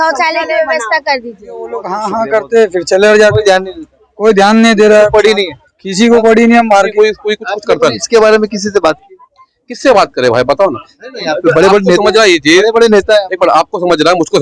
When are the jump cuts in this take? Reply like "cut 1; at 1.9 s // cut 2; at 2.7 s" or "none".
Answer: cut 1; at 1.9 s // cut 2; at 6.9 s